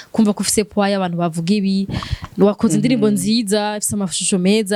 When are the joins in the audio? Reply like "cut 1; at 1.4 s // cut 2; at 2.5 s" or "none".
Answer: none